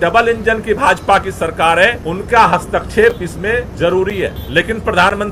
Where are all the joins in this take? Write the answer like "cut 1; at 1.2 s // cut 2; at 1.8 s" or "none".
cut 1; at 2.0 s // cut 2; at 3.7 s // cut 3; at 4.4 s